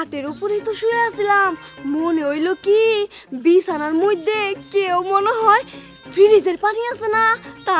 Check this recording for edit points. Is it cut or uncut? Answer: uncut